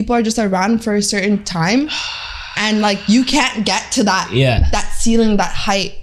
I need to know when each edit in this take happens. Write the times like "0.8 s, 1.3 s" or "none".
none